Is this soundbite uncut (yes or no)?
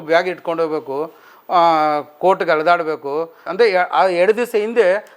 no